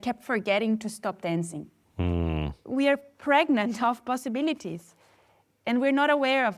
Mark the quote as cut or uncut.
cut